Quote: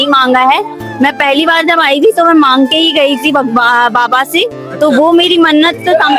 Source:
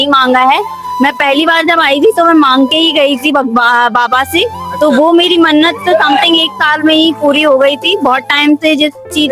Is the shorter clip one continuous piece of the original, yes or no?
yes